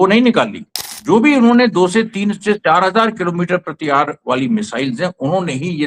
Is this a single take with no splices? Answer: no; 1 cut; at 0.9 s

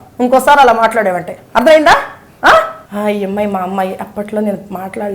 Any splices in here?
yes; 1 cut; at 2.8 s

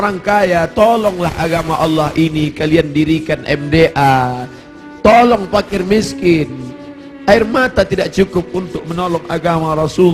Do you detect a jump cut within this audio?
no; 0 cuts

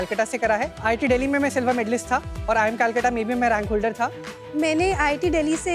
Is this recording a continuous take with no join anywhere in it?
no; 3 cuts; at 0.8 s, 2.3 s, 4.4 s

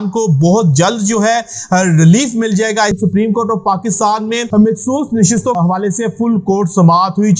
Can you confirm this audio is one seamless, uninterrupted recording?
no; 3 cuts; at 2.9 s, 4.4 s, 5.6 s

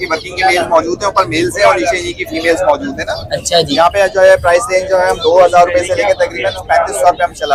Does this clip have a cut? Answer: no; 0 cuts

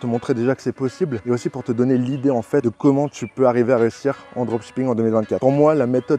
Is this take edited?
yes; 3 cuts; at 1.2 s, 2.6 s, 5.4 s

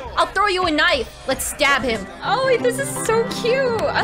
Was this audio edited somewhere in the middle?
yes; 1 cut; at 2.1 s

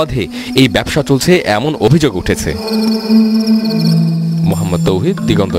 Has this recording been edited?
no; 0 cuts

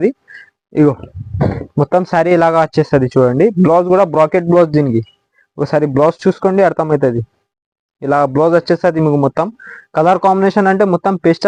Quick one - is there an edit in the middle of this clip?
no; 0 cuts

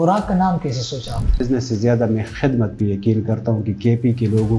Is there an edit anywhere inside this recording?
yes; 1 cut; at 1.4 s

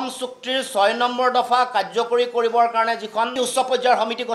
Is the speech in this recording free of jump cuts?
yes; 0 cuts

